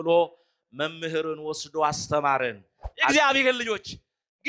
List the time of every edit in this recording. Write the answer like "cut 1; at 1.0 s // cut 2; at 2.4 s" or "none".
cut 1; at 3.1 s